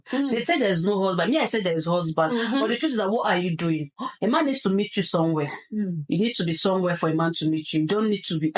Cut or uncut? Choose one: uncut